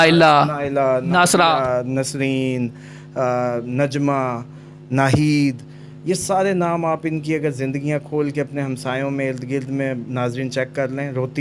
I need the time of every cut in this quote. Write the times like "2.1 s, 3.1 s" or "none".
none